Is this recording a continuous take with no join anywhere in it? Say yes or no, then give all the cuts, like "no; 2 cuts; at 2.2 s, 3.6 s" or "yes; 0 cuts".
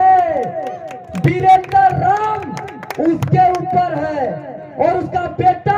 yes; 0 cuts